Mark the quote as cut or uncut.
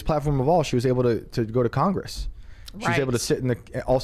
uncut